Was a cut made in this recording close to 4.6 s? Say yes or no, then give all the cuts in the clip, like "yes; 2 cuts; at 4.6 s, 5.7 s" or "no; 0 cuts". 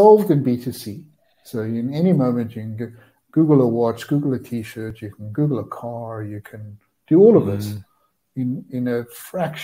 no; 0 cuts